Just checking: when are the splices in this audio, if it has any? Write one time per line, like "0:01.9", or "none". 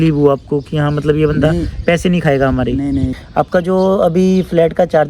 0:03.2